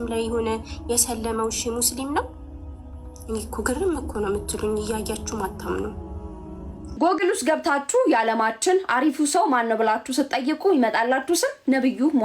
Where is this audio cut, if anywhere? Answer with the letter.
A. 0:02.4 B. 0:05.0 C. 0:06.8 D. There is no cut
C